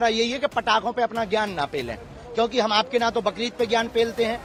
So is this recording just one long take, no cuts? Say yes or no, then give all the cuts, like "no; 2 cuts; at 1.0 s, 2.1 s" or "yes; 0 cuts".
yes; 0 cuts